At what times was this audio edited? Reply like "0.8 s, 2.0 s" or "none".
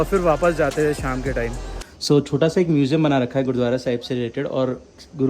1.7 s